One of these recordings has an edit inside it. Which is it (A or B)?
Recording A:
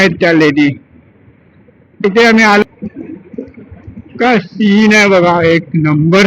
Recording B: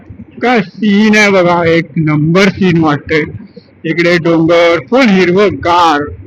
A